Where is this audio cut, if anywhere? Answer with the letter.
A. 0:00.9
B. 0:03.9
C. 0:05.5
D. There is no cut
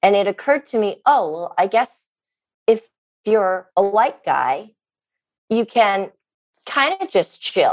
B